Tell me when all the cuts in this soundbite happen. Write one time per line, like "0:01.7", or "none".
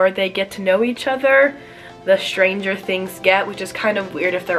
none